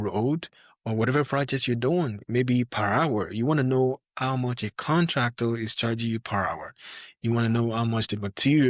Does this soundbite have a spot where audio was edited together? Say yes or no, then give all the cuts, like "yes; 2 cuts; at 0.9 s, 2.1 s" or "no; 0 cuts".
no; 0 cuts